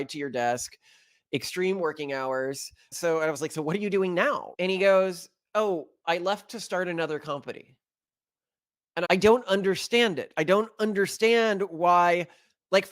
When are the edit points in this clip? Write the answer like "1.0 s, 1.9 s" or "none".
2.9 s, 9.0 s